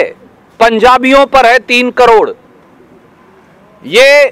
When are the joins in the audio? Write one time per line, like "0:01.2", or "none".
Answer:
none